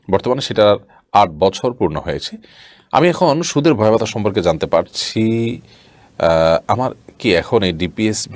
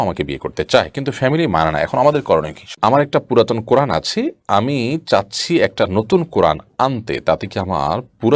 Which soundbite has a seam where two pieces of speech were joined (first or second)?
second